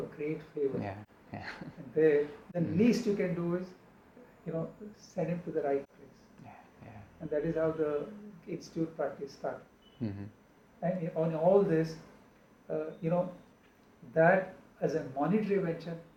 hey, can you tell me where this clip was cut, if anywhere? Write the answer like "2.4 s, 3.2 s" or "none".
none